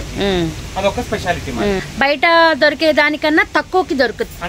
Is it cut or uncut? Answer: cut